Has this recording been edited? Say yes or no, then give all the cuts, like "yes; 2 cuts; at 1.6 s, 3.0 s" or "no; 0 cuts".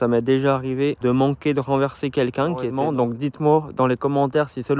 yes; 2 cuts; at 1.0 s, 2.8 s